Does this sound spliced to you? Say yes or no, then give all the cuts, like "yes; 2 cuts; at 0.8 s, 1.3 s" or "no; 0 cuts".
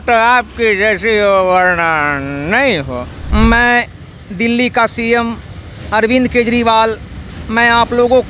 yes; 1 cut; at 3.1 s